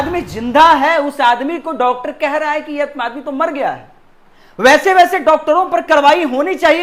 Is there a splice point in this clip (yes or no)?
no